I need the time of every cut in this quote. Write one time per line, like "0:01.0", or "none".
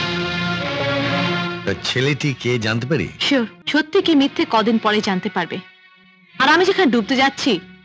0:03.6